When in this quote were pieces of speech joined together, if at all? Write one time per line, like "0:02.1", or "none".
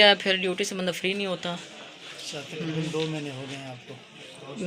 none